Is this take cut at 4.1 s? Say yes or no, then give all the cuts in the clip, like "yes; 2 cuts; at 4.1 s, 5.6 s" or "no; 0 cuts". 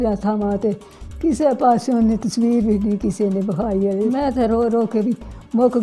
yes; 1 cut; at 4.1 s